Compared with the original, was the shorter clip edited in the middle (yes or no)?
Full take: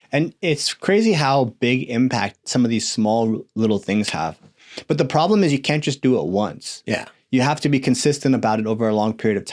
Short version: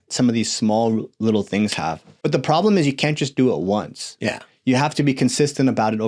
yes